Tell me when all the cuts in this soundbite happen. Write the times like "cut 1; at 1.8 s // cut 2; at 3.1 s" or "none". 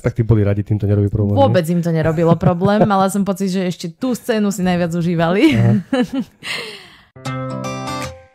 cut 1; at 7.1 s

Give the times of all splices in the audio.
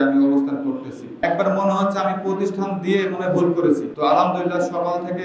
cut 1; at 1.2 s // cut 2; at 3.9 s

